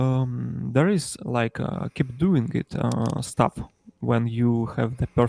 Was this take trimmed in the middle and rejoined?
no; 0 cuts

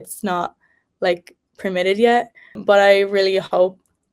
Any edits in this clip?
yes; 1 cut; at 2.6 s

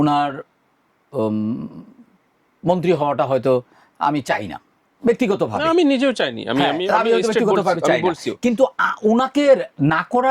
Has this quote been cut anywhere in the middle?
no; 0 cuts

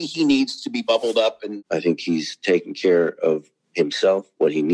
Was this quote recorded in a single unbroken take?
no; 1 cut; at 1.5 s

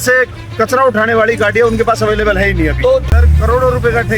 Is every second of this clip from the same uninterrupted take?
no; 1 cut; at 3.1 s

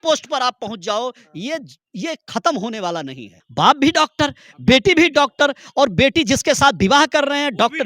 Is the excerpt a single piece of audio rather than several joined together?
no; 1 cut; at 3.4 s

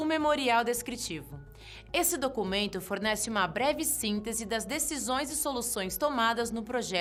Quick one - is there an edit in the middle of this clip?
no; 0 cuts

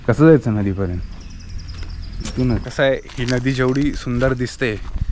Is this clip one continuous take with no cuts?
no; 1 cut; at 2.7 s

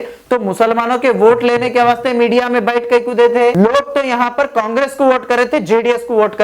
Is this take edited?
yes; 1 cut; at 3.5 s

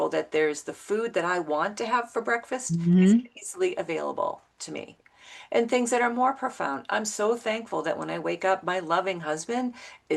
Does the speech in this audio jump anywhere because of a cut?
no; 0 cuts

